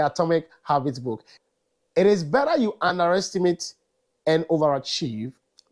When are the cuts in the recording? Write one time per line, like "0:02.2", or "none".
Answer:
0:01.3